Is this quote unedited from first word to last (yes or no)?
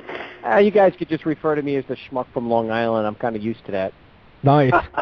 yes